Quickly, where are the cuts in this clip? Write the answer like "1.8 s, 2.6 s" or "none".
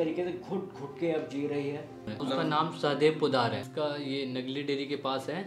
2.1 s, 3.6 s